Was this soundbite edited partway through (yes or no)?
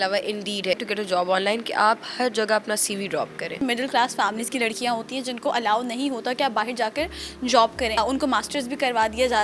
yes